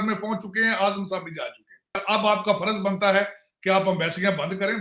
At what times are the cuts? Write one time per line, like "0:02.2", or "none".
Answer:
0:02.0